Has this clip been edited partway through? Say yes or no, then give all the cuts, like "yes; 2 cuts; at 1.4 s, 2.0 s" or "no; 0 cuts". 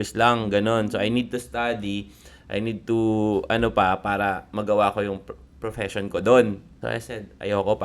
yes; 1 cut; at 6.7 s